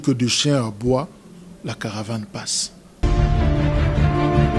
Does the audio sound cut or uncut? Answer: cut